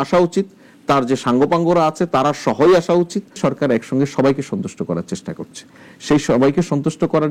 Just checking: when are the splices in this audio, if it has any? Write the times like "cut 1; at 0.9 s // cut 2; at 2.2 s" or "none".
cut 1; at 3.4 s